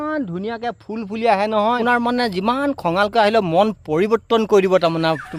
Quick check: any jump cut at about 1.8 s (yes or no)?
yes